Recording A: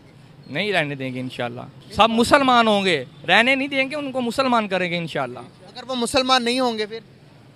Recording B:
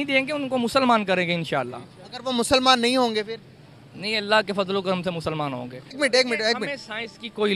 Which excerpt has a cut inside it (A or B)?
B